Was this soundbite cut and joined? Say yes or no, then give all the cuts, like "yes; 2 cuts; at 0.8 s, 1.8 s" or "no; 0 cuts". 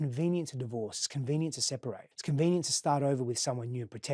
yes; 1 cut; at 2.1 s